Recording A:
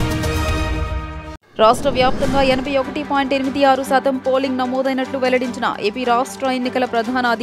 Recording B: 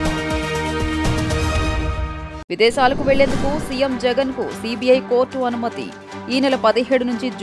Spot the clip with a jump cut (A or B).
B